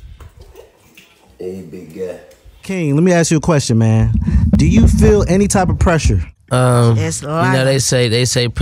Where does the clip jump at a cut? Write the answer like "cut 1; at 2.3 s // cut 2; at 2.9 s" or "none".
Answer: cut 1; at 2.8 s